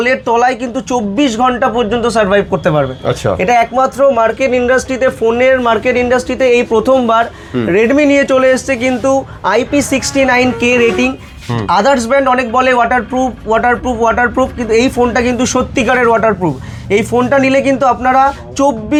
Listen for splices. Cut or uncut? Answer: uncut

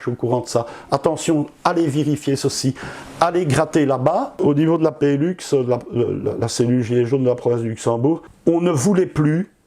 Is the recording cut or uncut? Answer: cut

